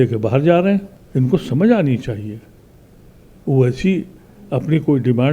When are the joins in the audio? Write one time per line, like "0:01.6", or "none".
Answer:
0:01.0